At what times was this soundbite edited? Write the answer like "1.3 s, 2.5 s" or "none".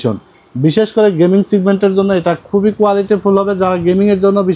none